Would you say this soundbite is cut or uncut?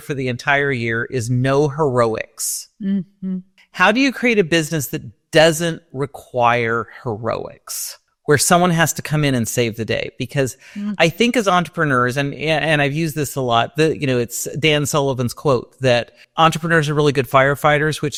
uncut